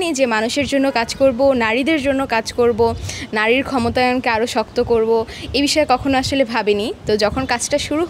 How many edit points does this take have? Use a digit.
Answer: 0